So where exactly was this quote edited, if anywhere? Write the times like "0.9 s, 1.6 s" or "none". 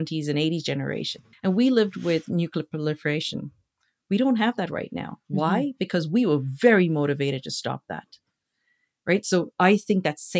1.1 s